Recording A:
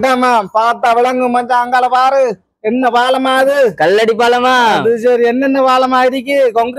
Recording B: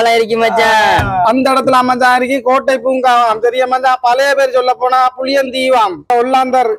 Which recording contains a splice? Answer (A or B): B